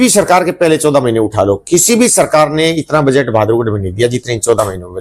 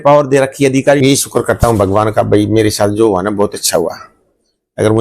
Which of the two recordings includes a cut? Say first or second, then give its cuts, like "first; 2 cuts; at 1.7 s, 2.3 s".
second; 1 cut; at 1.0 s